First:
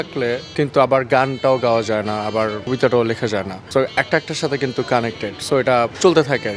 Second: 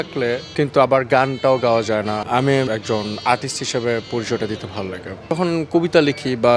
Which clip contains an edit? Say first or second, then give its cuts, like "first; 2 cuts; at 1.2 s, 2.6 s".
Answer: second; 2 cuts; at 2.6 s, 5.2 s